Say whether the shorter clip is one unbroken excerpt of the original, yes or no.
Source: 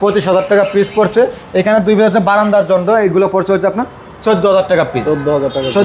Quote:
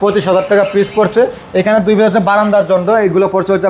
yes